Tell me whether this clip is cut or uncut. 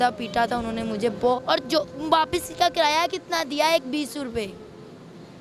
cut